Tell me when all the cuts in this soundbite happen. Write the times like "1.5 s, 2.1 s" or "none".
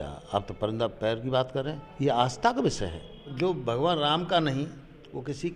3.3 s